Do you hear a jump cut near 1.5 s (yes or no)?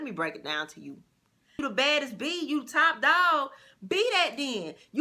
yes